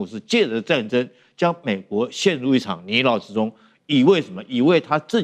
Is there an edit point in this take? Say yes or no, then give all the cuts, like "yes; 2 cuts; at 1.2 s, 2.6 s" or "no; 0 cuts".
no; 0 cuts